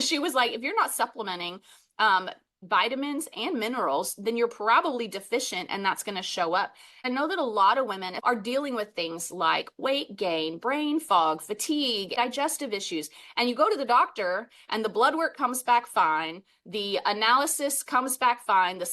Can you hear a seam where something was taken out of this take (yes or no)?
yes